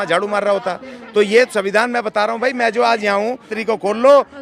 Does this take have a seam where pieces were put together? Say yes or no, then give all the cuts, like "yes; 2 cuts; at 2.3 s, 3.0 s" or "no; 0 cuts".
yes; 1 cut; at 3.5 s